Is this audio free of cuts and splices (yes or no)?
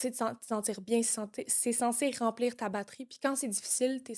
yes